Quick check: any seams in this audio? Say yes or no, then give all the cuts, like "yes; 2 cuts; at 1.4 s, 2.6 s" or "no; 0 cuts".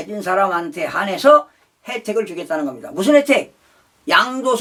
no; 0 cuts